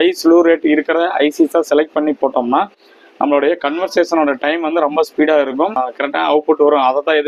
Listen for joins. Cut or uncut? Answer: cut